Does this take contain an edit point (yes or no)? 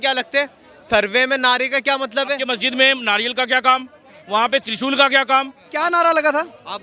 yes